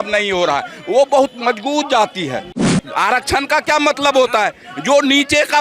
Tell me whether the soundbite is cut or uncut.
cut